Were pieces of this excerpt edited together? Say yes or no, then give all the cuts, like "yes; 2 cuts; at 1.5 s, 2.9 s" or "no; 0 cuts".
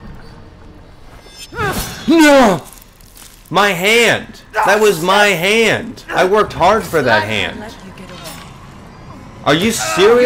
no; 0 cuts